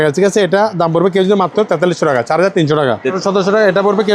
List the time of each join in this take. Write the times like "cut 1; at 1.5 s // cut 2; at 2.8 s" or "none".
cut 1; at 3.2 s